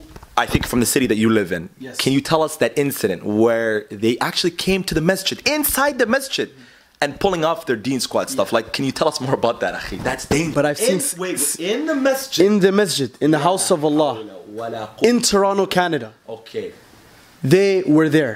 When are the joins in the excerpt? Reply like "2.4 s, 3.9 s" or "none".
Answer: 10.5 s